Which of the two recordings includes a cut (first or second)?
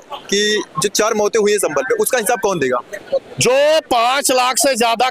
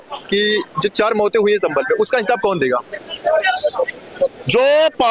first